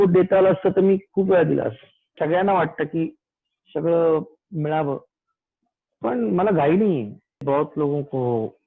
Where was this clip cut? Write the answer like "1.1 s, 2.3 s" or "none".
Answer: 2.1 s, 7.4 s